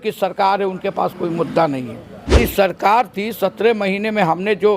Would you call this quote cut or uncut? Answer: cut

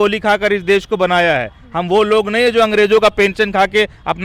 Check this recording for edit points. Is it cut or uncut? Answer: uncut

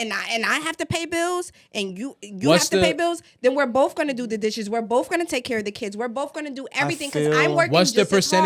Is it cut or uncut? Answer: uncut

